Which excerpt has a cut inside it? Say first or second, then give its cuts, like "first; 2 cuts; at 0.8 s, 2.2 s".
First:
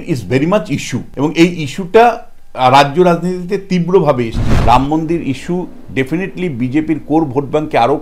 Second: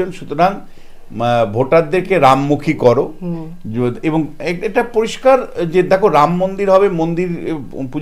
first; 2 cuts; at 1.0 s, 4.5 s